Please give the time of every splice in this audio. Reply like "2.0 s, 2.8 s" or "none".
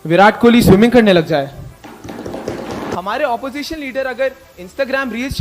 2.9 s